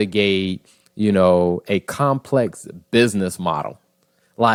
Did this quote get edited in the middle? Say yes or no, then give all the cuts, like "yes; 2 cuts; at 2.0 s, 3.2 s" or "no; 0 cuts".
no; 0 cuts